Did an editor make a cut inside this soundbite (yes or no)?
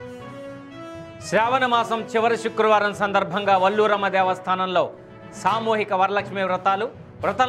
yes